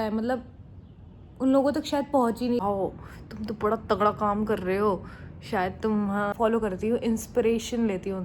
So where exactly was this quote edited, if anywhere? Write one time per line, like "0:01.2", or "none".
0:02.6
0:06.3